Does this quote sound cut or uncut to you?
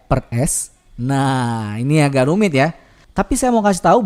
uncut